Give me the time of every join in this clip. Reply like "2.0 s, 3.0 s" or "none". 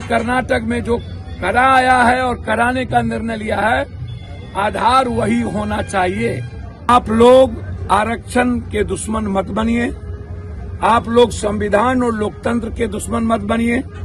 6.9 s